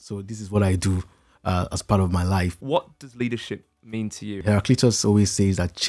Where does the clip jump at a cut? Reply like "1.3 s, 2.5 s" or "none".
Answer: 2.6 s, 4.3 s

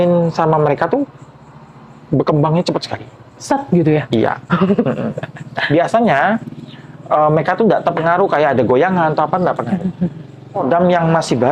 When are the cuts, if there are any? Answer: 10.6 s

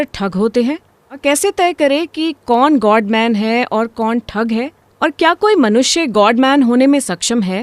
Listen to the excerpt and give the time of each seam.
1.2 s

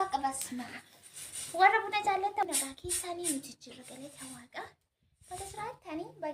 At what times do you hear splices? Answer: 2.4 s

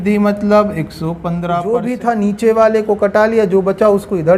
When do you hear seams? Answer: 1.6 s

